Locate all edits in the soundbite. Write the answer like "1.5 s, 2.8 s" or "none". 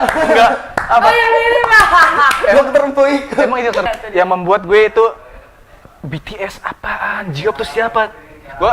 3.8 s